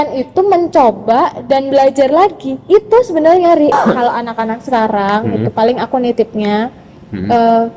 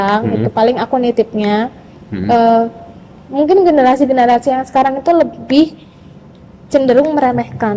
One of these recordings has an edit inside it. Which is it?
first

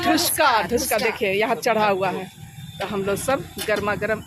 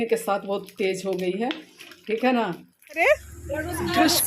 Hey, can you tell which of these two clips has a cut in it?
second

